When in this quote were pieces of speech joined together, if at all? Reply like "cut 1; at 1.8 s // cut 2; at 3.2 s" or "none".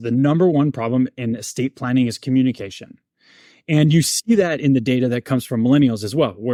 none

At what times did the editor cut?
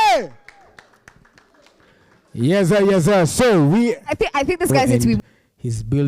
cut 1; at 5.2 s

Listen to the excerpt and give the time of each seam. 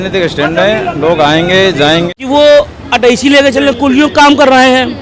cut 1; at 2.1 s

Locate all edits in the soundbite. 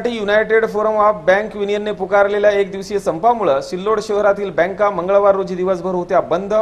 none

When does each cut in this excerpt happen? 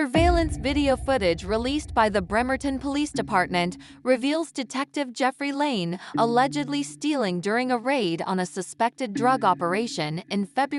none

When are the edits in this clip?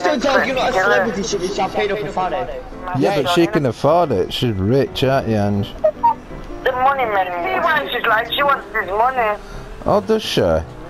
cut 1; at 3.0 s // cut 2; at 7.4 s

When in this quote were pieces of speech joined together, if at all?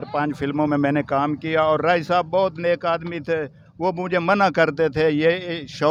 none

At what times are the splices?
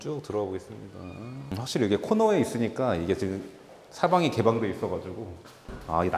cut 1; at 1.5 s

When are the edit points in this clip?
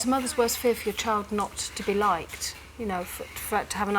none

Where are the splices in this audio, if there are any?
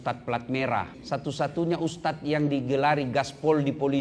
cut 1; at 1.0 s

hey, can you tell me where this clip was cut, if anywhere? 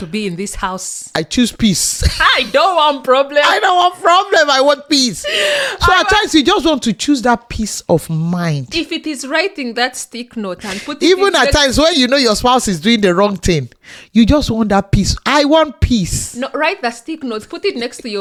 none

